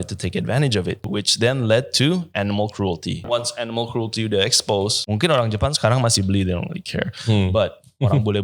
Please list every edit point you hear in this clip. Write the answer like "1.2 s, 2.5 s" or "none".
1.0 s, 3.2 s, 5.0 s